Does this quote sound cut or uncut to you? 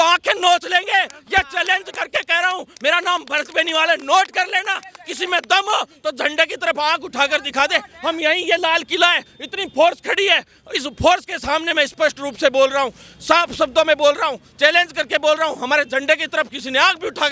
uncut